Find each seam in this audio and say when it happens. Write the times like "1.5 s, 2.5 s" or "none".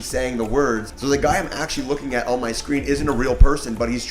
0.9 s